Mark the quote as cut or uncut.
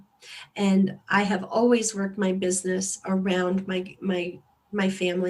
uncut